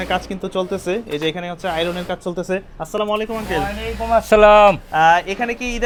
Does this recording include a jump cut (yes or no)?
no